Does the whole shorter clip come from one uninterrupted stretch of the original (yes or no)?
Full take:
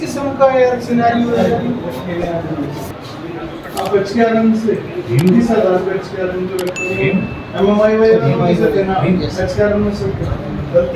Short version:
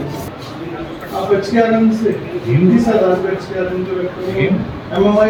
yes